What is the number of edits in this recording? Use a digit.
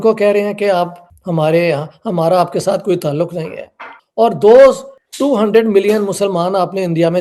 0